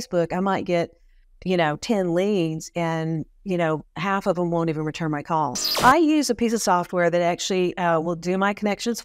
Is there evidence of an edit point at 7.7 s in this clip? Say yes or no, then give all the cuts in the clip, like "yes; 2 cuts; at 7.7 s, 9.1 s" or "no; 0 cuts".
no; 1 cut; at 5.6 s